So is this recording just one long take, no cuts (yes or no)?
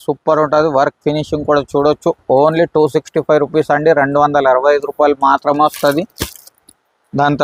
yes